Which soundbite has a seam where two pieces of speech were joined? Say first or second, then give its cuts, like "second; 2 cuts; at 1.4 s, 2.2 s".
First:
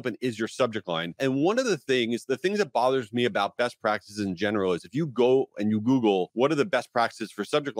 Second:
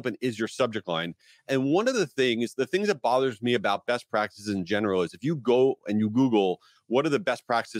first; 2 cuts; at 1.1 s, 6.3 s